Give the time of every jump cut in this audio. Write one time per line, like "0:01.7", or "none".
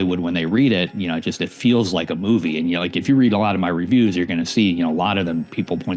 none